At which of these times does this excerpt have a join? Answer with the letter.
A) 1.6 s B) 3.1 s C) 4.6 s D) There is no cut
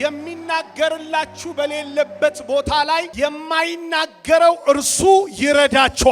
B